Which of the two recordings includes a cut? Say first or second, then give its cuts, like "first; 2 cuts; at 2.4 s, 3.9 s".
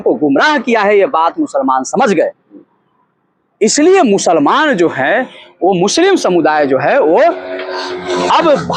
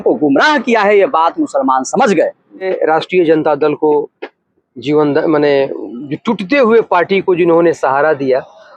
second; 1 cut; at 2.7 s